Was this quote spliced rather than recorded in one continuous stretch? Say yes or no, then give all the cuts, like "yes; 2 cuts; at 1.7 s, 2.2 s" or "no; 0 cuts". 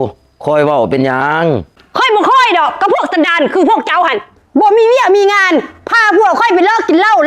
no; 0 cuts